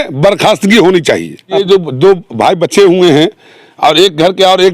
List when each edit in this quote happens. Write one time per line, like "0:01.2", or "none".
0:01.6

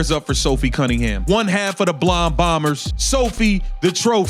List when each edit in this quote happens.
0:01.2
0:02.9

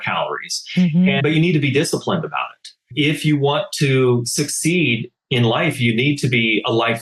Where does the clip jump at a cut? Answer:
0:01.2
0:02.9

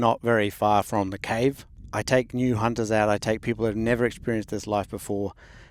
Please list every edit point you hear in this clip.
0:01.7

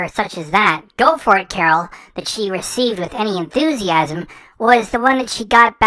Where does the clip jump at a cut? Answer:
none

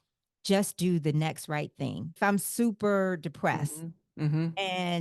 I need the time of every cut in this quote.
0:02.1

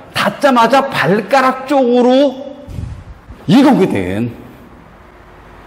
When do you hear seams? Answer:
none

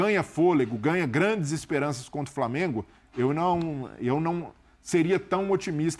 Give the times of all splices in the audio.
none

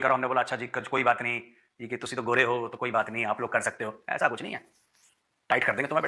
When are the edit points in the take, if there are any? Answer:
none

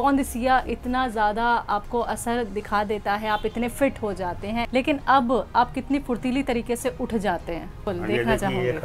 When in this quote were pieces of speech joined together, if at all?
0:04.7
0:07.9

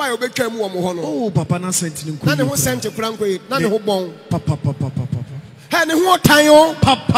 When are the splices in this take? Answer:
none

